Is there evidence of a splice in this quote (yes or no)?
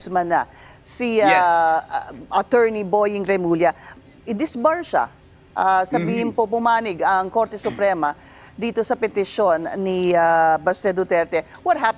yes